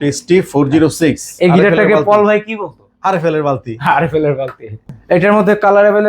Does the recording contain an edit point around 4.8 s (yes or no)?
yes